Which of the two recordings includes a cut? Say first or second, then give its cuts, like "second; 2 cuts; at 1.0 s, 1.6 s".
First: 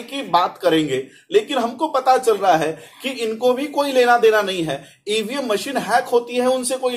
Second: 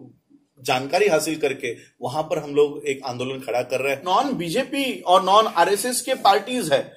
second; 1 cut; at 4.0 s